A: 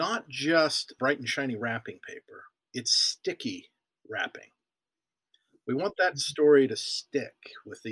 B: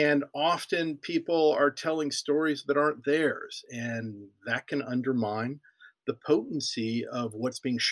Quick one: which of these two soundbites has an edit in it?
A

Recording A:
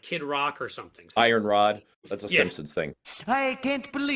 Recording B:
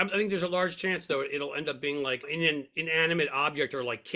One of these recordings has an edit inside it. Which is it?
A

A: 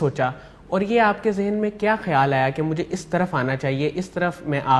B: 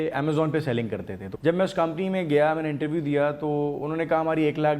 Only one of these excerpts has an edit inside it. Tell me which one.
B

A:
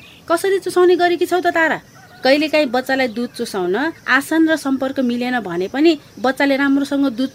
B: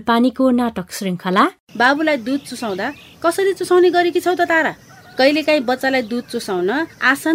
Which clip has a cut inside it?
B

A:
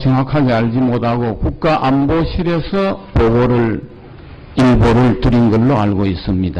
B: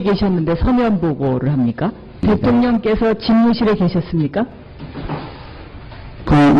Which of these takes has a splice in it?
A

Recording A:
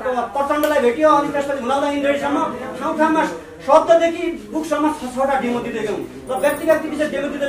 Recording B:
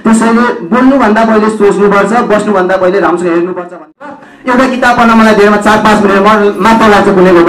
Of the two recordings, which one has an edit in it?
B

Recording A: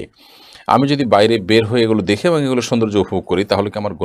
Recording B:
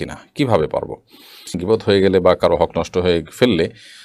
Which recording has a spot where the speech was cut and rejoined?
B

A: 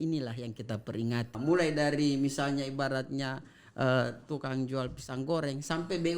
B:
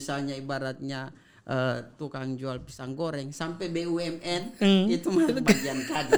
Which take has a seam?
A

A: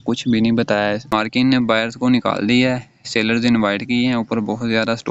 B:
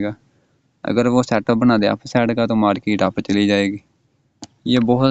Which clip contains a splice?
A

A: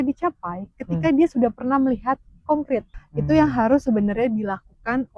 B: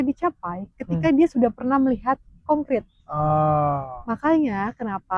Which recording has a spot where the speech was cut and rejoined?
A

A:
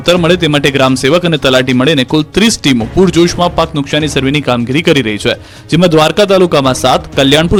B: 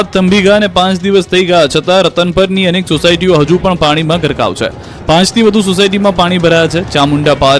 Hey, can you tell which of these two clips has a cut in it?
B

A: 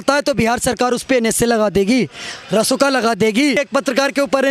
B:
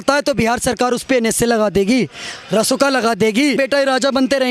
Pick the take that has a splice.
B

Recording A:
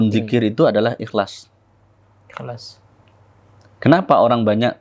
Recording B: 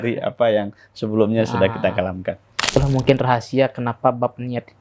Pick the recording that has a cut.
B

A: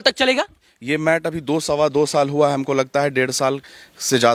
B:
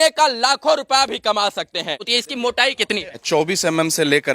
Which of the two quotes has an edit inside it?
B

